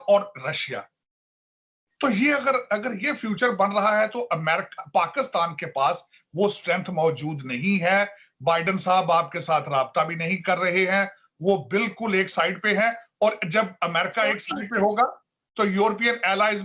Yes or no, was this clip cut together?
no